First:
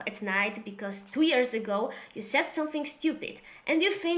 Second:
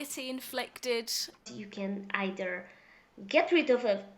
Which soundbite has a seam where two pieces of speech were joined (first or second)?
second